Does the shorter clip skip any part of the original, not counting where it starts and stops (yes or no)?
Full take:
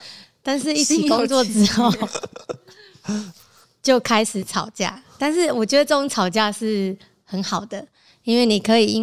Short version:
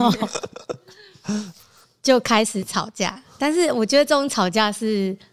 no